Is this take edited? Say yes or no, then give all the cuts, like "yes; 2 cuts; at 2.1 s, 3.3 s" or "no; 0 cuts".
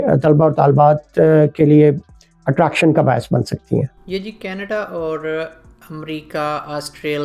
no; 0 cuts